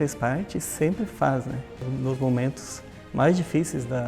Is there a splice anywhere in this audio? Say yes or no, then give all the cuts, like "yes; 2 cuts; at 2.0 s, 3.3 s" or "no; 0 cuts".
yes; 1 cut; at 1.8 s